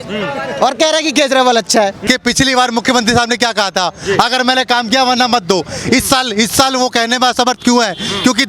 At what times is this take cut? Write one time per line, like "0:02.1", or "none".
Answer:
0:02.0